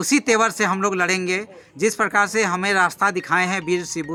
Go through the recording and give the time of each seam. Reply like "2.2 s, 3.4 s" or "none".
none